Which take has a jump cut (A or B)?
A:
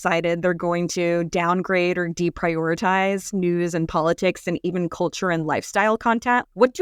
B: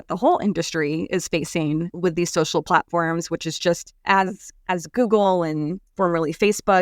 B